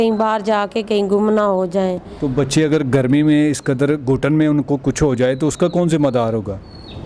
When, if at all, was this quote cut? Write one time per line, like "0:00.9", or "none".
none